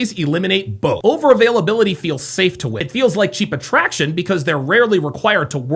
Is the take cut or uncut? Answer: cut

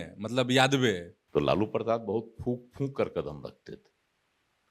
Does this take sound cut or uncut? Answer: cut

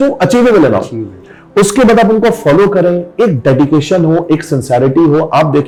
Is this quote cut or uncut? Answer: uncut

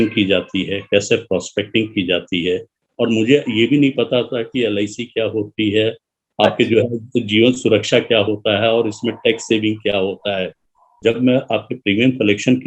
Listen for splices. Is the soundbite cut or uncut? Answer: cut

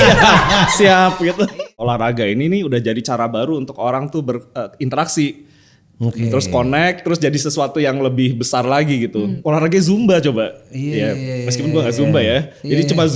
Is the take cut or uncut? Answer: cut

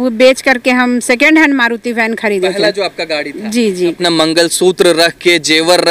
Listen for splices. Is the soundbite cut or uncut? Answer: cut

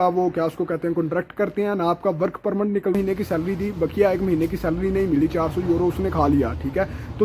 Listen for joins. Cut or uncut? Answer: cut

